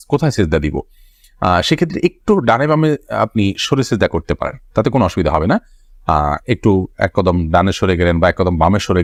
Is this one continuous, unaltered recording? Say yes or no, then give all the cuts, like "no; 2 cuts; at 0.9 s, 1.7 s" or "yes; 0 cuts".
yes; 0 cuts